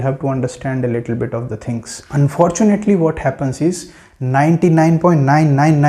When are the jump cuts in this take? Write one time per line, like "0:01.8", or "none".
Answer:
0:02.0